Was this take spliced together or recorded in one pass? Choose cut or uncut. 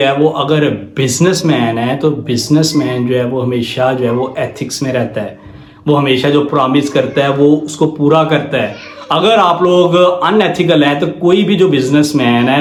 uncut